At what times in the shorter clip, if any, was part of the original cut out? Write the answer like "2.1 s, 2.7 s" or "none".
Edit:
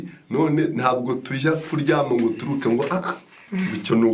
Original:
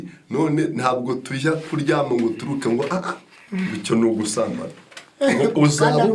none